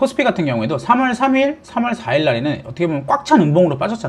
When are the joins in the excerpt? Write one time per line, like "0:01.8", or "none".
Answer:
none